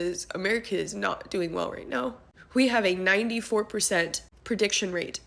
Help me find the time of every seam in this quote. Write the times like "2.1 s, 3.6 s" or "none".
none